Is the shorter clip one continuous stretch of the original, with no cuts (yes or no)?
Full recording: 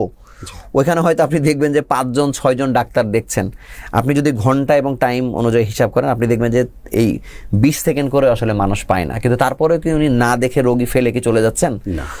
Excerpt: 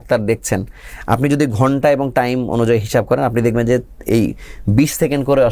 yes